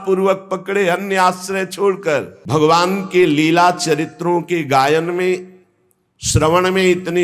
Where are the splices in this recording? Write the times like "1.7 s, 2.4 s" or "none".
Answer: 2.4 s